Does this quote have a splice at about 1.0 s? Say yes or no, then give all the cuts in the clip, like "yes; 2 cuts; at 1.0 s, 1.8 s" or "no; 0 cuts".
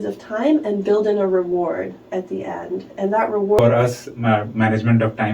no; 1 cut; at 3.6 s